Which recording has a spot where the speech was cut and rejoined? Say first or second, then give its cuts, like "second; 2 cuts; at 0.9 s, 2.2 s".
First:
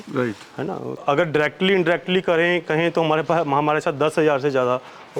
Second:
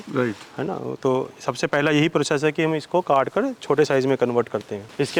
first; 1 cut; at 1.0 s